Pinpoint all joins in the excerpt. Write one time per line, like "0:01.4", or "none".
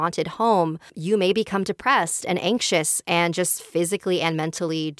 0:00.9